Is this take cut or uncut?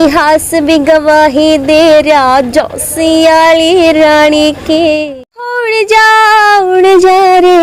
cut